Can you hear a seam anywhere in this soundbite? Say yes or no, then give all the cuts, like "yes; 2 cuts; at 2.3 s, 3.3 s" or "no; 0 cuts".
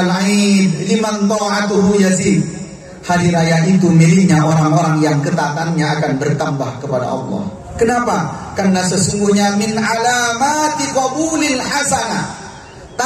yes; 1 cut; at 7.6 s